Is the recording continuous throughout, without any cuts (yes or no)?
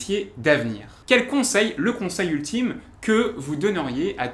no